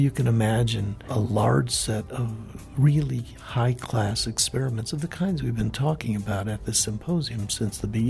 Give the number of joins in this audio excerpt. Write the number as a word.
one